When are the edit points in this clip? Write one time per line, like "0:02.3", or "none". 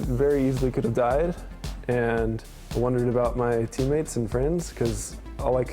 0:02.5